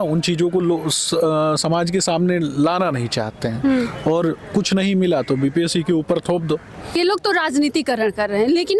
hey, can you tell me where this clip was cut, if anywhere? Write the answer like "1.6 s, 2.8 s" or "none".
7.0 s